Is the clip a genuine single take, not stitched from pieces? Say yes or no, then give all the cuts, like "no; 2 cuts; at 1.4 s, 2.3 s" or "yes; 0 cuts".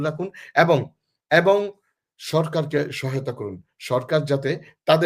yes; 0 cuts